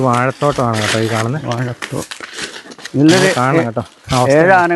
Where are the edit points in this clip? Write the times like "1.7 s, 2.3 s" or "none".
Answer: 2.8 s

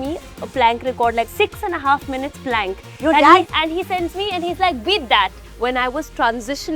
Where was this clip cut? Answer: 1.3 s, 3.5 s, 5.4 s

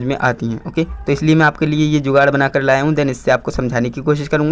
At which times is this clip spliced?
none

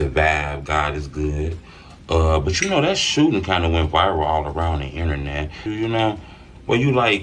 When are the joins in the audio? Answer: 5.6 s

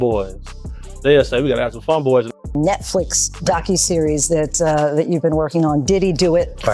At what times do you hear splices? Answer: 2.5 s

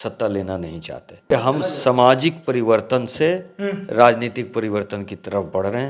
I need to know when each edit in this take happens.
1.3 s

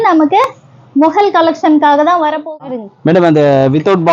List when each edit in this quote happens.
2.4 s

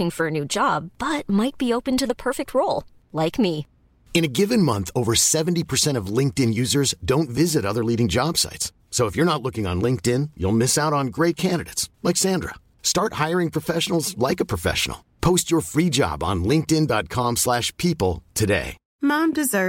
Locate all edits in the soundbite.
18.8 s

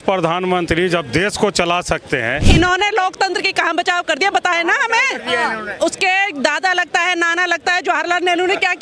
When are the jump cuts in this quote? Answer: 2.4 s

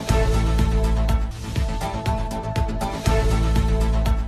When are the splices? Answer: none

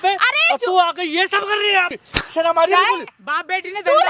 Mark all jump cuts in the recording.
1.9 s, 3.1 s

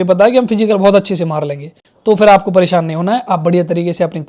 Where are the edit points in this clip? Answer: none

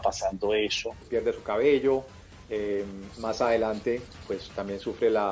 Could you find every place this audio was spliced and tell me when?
1.0 s

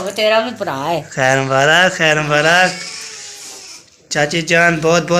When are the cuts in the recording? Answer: none

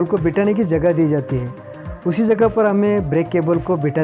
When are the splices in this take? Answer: none

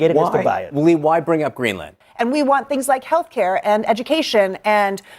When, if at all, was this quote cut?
2.0 s

